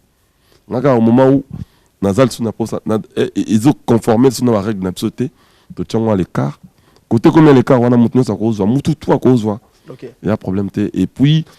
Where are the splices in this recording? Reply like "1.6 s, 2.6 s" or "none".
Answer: none